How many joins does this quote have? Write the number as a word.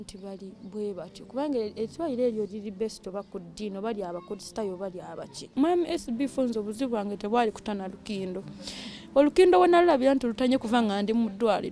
one